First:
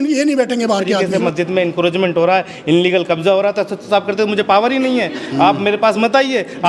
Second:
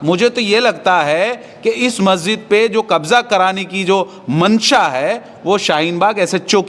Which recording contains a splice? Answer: first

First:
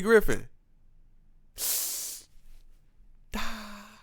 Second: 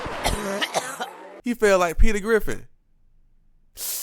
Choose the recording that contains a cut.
second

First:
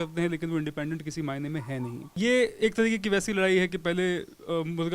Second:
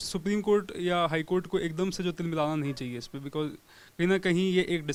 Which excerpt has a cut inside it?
first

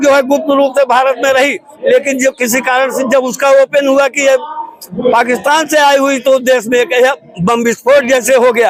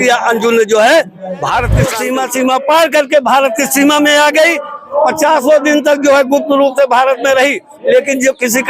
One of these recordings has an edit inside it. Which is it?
second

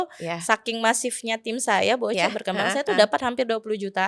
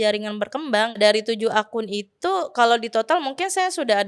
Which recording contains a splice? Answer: second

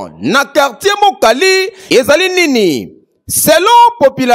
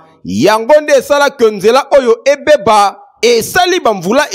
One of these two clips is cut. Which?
first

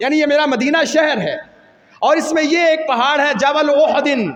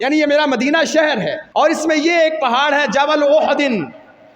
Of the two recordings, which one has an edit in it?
second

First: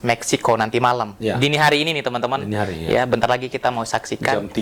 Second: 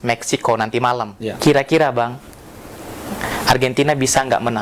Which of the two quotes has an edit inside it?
second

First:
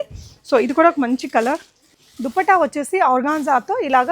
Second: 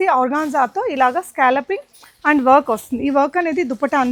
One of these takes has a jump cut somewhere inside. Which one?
first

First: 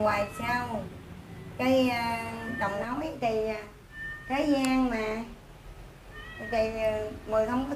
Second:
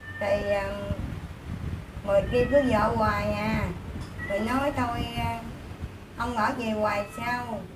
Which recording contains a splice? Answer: first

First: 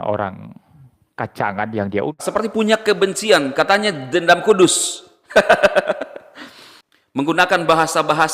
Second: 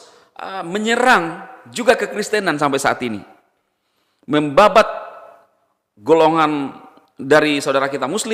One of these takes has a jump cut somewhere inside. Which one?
first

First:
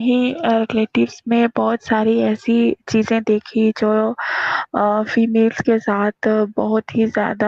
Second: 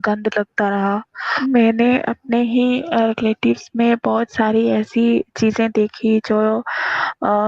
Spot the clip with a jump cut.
second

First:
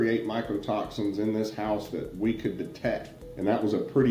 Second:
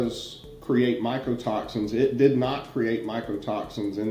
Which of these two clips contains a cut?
first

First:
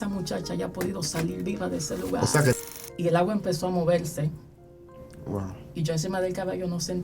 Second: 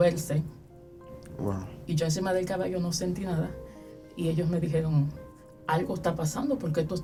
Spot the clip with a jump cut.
first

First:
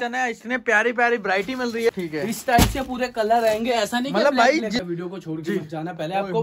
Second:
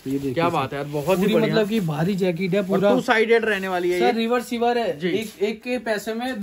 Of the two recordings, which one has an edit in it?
first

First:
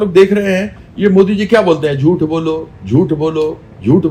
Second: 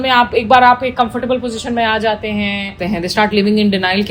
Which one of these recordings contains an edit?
second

